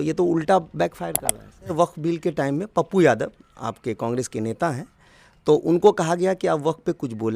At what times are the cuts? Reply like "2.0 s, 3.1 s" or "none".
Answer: 1.7 s

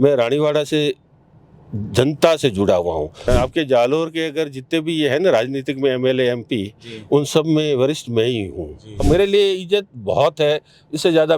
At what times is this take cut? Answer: 3.2 s, 9.0 s

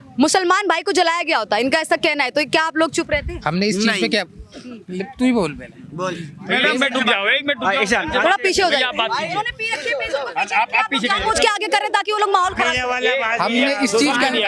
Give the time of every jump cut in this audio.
none

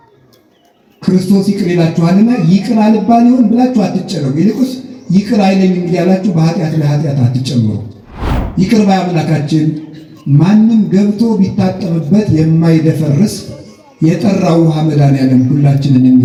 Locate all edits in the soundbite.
none

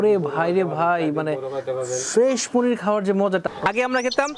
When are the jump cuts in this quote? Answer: 3.4 s

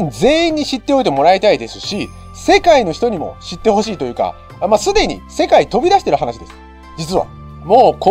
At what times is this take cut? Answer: none

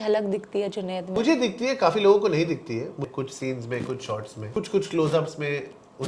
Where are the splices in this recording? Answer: 1.1 s, 3.0 s, 4.5 s

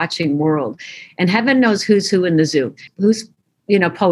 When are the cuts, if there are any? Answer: 2.9 s

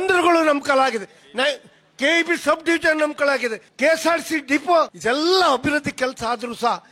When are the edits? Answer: 3.7 s, 4.9 s

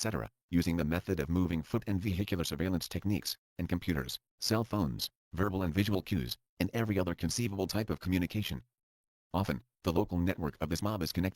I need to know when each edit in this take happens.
none

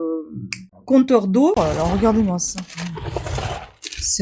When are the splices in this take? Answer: 1.6 s

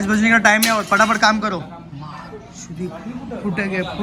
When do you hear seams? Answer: none

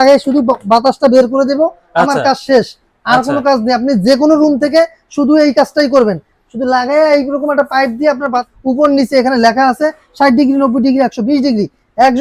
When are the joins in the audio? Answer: 8.5 s

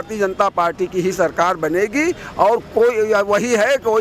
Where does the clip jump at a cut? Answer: none

